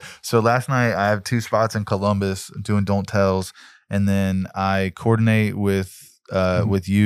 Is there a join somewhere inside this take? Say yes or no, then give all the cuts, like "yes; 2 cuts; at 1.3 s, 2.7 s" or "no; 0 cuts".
no; 0 cuts